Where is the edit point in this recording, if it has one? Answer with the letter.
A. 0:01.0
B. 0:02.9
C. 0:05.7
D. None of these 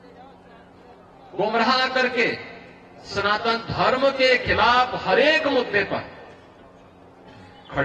D